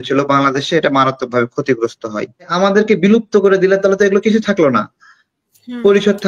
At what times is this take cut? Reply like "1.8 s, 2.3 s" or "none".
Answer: 2.5 s